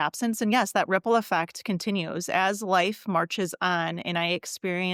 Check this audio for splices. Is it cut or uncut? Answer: uncut